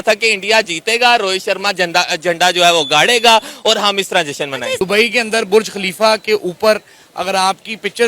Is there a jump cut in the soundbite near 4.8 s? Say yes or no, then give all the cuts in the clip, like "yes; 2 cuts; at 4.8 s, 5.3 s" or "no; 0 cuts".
yes; 1 cut; at 4.8 s